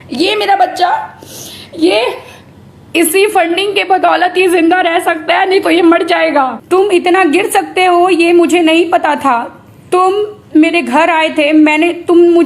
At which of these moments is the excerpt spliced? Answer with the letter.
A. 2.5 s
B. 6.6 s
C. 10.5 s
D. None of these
B